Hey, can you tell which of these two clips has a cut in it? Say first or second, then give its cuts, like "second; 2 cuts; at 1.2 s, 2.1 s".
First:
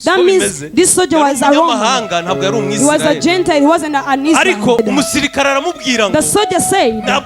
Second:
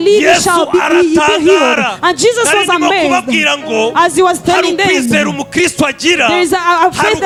first; 1 cut; at 4.8 s